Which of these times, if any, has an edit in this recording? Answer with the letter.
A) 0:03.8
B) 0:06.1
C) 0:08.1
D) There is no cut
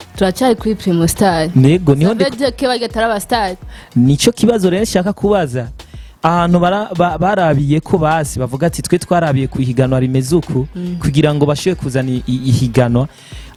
D